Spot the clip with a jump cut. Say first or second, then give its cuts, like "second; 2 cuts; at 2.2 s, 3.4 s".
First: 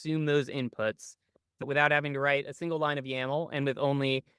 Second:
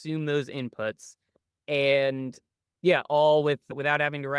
first; 1 cut; at 1.6 s